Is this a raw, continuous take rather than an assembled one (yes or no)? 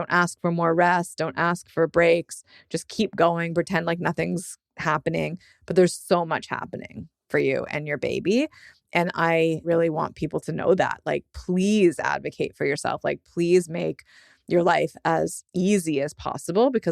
no